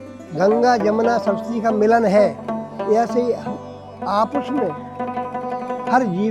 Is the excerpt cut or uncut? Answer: uncut